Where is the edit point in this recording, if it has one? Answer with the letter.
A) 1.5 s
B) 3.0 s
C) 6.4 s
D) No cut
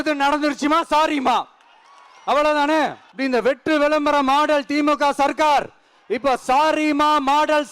B